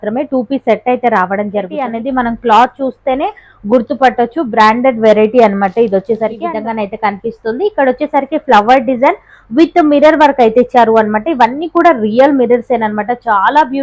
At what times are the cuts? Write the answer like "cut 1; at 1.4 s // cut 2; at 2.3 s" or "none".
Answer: cut 1; at 1.9 s // cut 2; at 6.4 s